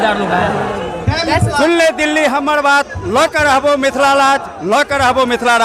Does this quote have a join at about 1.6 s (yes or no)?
yes